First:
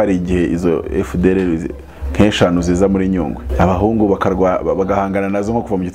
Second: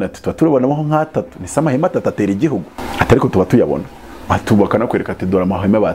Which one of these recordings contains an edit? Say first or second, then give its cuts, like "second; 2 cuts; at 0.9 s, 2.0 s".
first; 1 cut; at 3.4 s